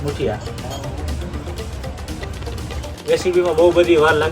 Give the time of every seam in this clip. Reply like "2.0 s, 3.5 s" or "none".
2.9 s